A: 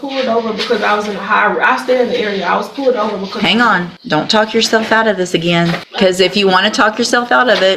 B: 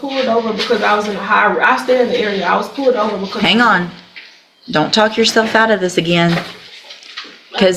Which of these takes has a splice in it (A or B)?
A